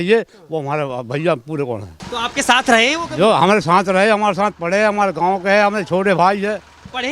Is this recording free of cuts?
no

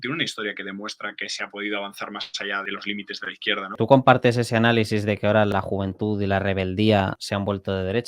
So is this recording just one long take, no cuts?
no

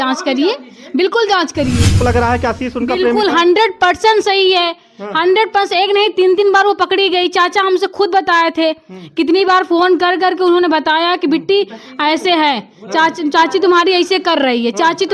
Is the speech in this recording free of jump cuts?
no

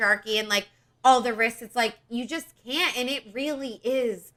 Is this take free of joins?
yes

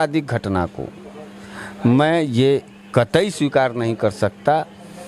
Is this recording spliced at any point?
no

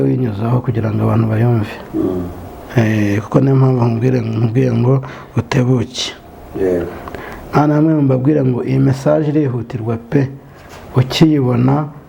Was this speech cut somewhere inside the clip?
no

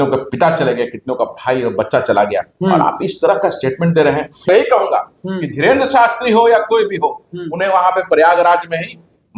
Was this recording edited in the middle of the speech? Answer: yes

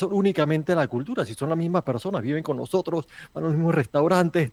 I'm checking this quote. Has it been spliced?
no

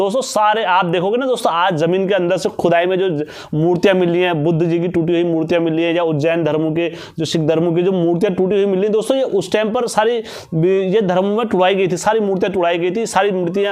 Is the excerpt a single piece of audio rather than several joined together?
yes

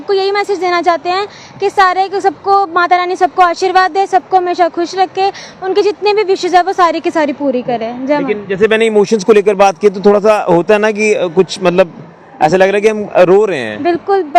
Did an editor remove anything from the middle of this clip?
no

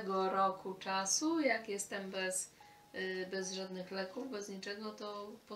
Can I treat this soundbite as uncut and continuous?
yes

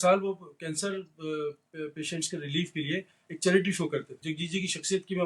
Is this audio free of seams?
no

